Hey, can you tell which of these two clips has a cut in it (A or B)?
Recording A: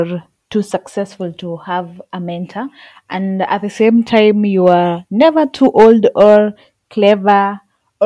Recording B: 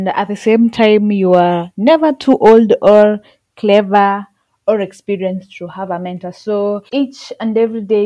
B